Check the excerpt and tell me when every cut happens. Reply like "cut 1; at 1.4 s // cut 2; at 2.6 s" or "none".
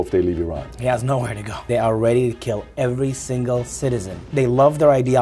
cut 1; at 1.6 s // cut 2; at 4.3 s